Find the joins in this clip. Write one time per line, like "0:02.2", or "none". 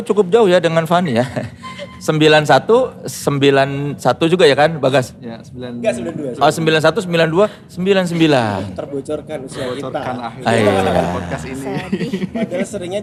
none

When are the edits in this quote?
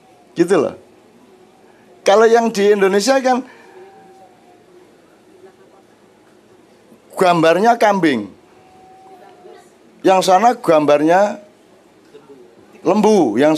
none

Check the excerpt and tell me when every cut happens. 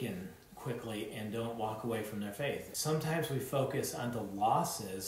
0:02.7

